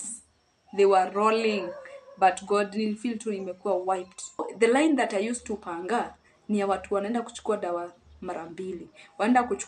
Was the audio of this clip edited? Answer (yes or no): yes